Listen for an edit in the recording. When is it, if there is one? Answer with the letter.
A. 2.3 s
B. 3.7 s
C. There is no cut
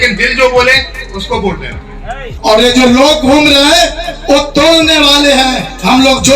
A